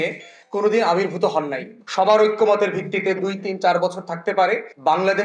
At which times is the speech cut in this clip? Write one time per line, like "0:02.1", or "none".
0:01.8

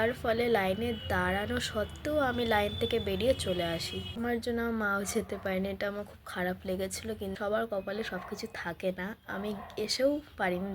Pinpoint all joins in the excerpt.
0:04.2
0:07.4

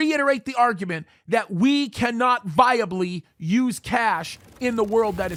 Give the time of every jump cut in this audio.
none

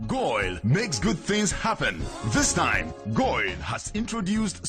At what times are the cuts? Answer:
0:00.9

